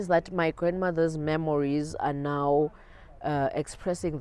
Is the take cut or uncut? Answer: uncut